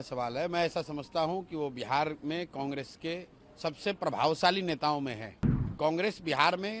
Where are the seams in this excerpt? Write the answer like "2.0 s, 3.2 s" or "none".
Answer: 5.7 s